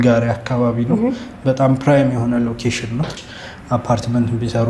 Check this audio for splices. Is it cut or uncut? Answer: cut